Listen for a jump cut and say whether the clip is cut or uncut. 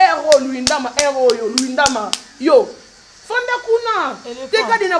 uncut